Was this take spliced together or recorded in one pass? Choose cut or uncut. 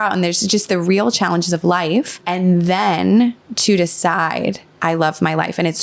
cut